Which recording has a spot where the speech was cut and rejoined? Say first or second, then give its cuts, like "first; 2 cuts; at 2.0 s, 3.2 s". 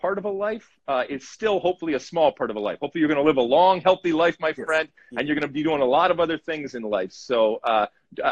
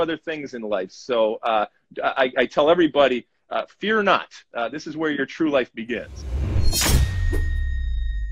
second; 1 cut; at 6.4 s